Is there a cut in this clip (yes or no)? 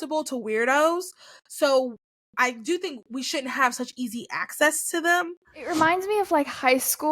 yes